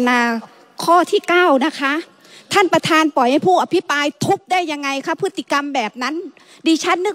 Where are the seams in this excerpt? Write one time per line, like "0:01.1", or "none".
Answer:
none